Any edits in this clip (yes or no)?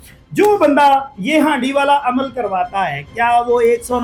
no